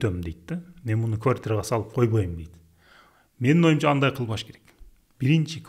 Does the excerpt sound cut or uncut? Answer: uncut